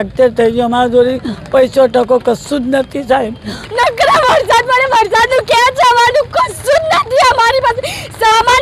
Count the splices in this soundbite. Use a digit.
1